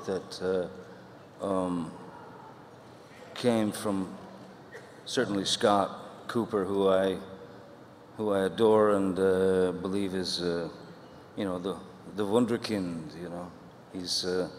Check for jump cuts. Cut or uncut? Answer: uncut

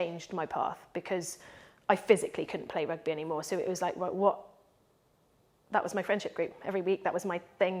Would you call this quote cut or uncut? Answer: uncut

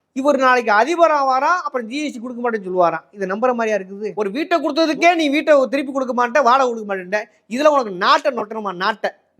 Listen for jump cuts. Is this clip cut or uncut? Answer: cut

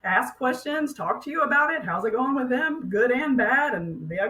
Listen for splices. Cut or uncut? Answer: uncut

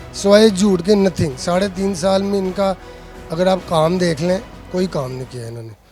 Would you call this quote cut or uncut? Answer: uncut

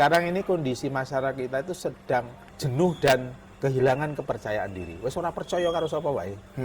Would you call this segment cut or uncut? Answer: cut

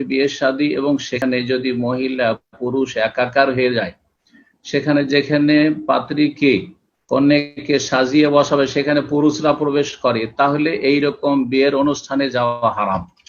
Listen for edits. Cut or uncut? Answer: cut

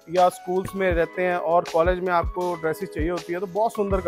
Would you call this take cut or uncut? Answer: uncut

